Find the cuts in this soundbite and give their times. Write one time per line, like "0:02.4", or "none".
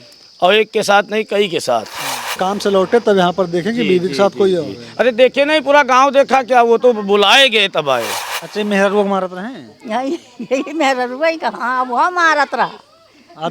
0:02.4
0:08.3